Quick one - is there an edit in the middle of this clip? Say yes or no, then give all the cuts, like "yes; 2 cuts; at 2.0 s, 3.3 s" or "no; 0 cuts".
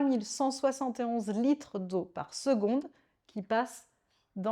no; 0 cuts